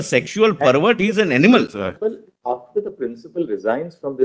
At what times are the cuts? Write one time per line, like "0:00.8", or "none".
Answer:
0:02.0